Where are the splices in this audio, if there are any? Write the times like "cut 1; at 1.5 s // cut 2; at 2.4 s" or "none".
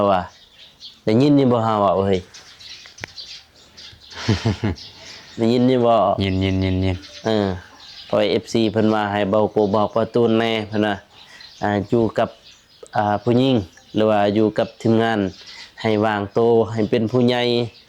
none